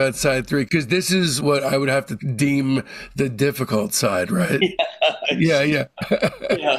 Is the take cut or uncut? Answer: uncut